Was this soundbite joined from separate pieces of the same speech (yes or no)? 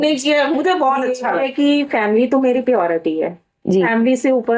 yes